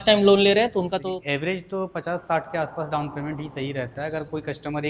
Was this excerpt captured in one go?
no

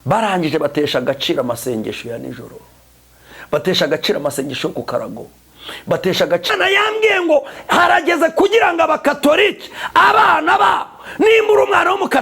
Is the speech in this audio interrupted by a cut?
yes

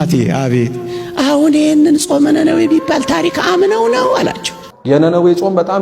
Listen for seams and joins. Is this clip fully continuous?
no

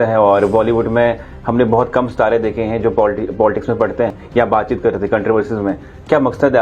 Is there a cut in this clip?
yes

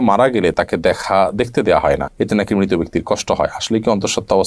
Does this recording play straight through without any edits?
yes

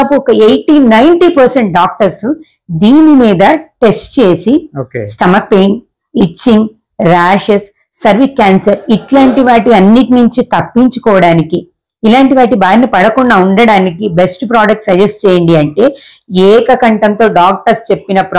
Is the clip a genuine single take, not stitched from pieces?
yes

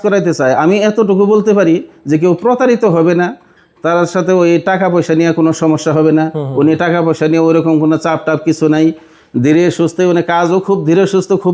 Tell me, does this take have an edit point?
no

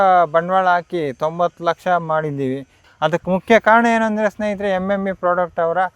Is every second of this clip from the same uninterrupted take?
yes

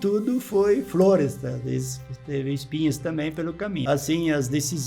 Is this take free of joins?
no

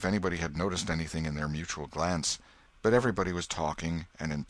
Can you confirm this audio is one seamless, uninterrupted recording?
yes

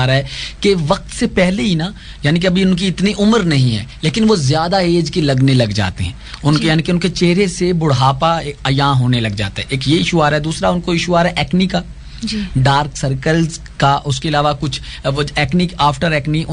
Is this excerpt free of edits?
yes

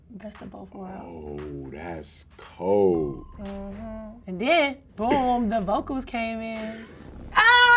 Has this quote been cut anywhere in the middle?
yes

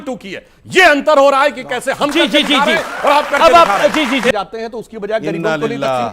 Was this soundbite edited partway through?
yes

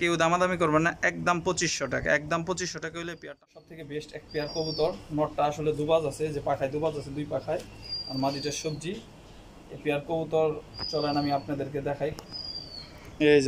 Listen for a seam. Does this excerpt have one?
yes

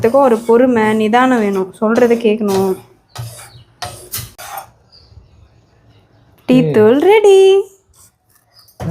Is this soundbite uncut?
no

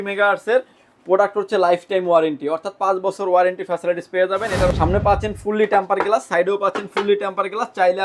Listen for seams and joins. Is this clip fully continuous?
no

